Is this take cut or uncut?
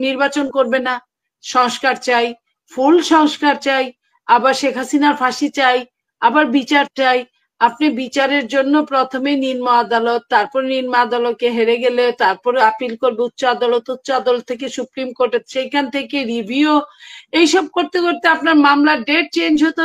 uncut